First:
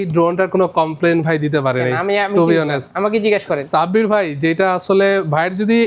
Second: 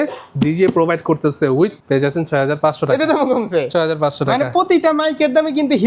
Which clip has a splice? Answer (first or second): second